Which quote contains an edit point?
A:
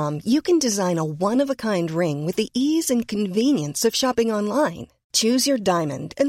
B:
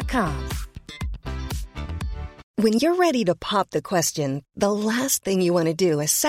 B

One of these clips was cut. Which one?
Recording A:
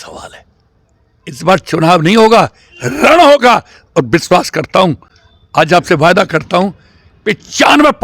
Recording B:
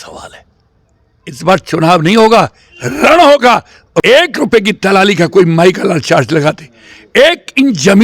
B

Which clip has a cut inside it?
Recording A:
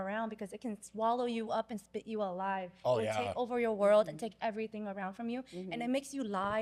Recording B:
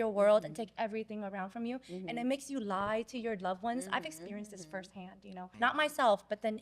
B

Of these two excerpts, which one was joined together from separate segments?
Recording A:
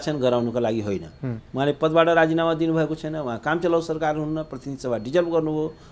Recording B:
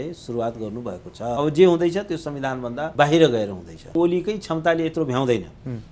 B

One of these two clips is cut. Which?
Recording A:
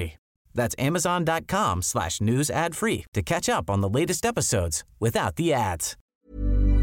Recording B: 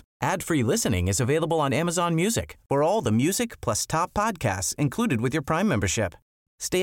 A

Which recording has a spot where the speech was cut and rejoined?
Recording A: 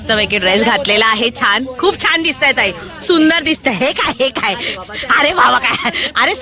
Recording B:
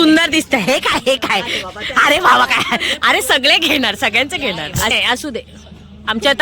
B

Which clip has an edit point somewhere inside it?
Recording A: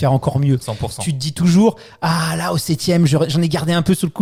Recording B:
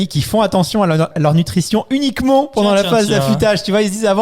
B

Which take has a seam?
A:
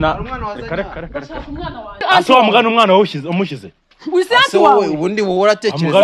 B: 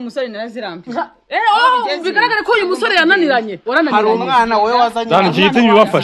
A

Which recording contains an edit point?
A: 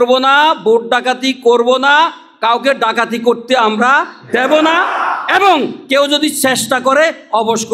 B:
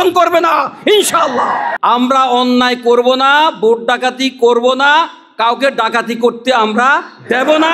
B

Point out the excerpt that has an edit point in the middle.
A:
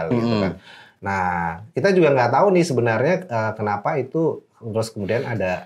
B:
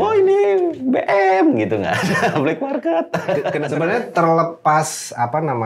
B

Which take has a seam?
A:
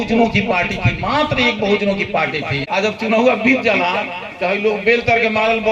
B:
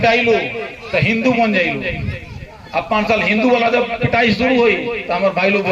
A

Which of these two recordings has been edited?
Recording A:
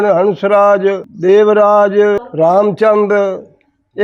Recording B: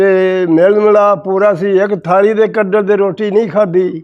A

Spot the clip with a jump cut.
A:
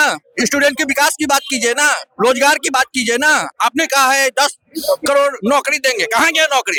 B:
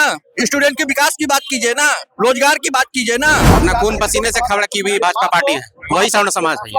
B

